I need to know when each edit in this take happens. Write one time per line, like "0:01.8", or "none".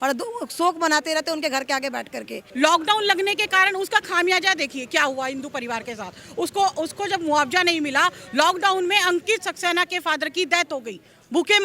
0:02.4